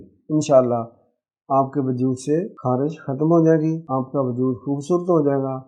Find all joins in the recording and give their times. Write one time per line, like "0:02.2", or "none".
0:02.5
0:03.8

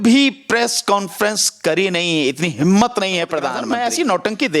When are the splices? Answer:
0:03.6

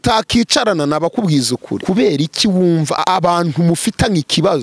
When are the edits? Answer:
0:01.7
0:03.0

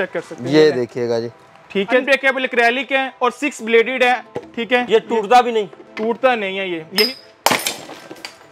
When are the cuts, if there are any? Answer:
0:02.0
0:07.1

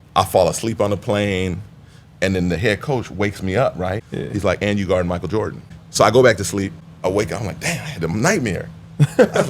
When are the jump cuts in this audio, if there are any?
0:04.1
0:05.8
0:06.8

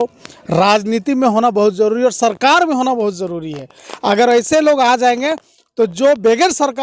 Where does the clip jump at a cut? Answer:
none

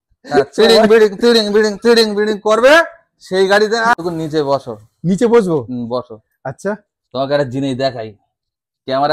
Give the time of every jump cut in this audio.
0:03.9

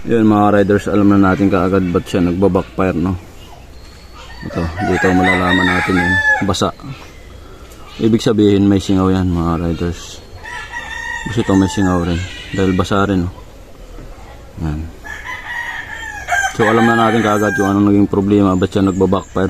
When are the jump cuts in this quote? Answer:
none

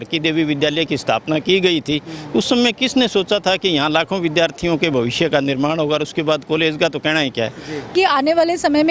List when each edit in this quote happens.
0:07.9

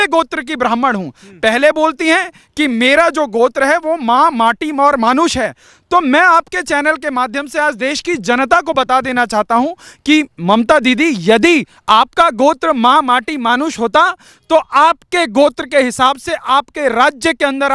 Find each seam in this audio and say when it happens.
none

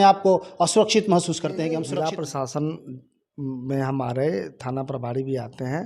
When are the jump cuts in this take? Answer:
0:01.9

